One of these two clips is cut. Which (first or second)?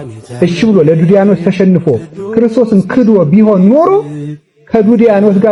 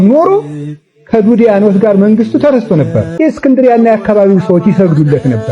second